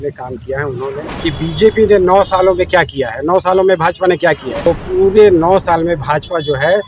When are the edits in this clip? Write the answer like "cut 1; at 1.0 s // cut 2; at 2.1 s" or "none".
cut 1; at 1.1 s // cut 2; at 4.5 s